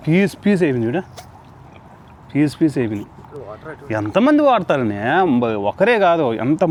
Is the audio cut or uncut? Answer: uncut